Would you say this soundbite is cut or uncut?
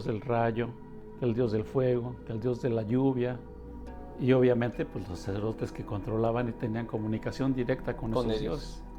uncut